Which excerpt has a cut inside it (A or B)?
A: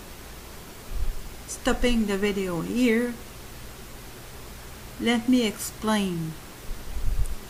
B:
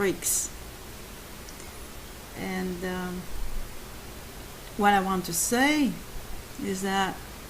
B